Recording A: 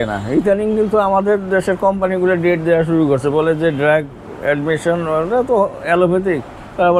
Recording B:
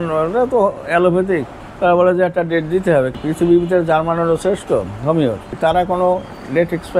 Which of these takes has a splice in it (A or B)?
B